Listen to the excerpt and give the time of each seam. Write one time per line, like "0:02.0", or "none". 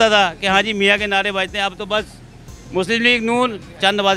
none